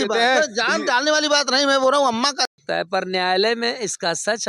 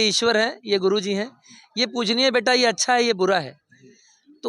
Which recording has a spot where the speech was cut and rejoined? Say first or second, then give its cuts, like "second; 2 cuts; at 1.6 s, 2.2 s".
first; 1 cut; at 2.4 s